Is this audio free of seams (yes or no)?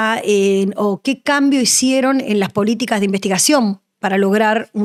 yes